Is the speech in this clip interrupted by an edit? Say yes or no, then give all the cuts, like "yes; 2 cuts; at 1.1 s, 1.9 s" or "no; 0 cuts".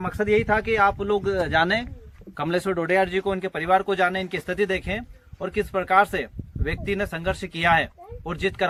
no; 0 cuts